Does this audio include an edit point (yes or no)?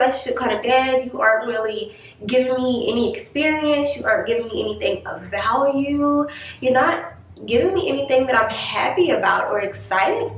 no